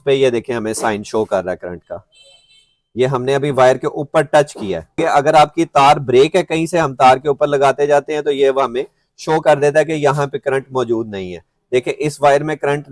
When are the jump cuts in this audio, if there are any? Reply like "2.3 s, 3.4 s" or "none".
5.0 s